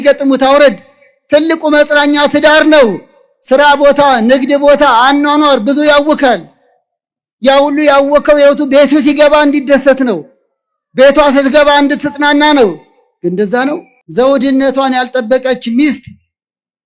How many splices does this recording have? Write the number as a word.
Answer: one